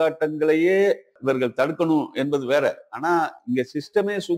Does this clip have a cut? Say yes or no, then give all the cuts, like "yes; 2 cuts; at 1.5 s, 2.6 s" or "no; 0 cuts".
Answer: yes; 1 cut; at 1.2 s